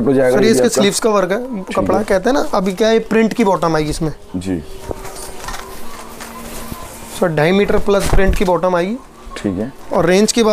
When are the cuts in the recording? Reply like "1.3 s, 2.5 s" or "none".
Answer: none